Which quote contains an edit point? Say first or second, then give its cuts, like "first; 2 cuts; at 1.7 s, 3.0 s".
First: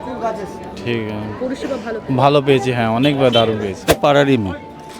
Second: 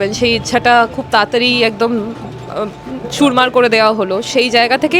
first; 1 cut; at 3.9 s